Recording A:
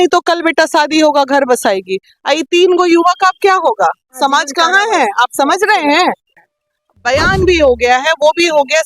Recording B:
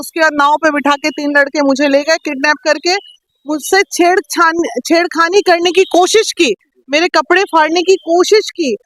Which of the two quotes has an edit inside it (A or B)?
A